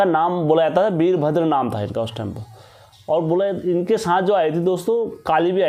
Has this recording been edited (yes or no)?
no